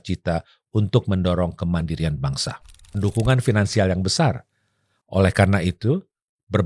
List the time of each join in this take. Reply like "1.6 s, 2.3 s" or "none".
3.0 s